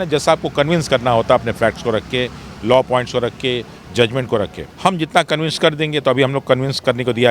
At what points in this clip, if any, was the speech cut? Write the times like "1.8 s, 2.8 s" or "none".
4.6 s